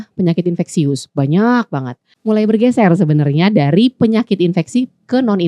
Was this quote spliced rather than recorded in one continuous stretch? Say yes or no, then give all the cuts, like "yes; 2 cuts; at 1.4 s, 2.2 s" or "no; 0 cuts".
yes; 1 cut; at 2.1 s